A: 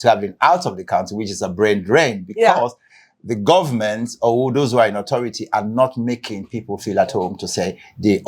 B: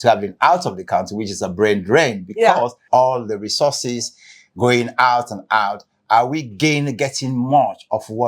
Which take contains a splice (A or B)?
B